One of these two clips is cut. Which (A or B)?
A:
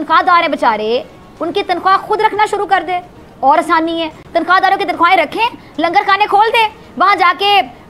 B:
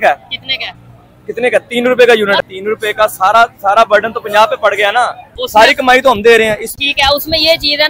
B